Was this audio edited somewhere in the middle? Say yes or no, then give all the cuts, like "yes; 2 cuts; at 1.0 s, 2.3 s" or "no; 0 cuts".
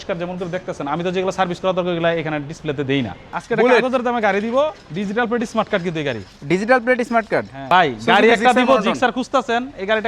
yes; 2 cuts; at 3.2 s, 7.6 s